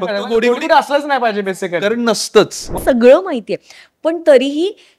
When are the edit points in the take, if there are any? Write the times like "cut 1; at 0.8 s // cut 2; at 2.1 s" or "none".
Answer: cut 1; at 2.8 s

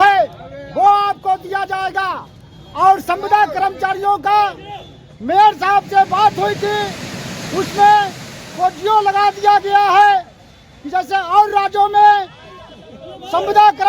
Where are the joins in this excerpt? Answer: cut 1; at 1.5 s

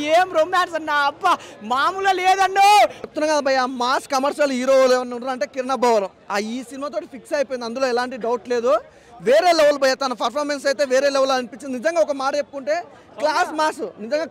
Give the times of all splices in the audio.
cut 1; at 3.1 s

